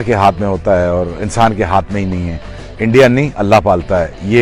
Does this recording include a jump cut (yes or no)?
no